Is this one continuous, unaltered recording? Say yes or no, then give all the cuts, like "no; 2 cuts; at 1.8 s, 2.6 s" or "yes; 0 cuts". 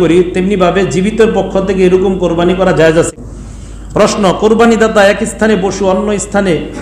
no; 1 cut; at 3.1 s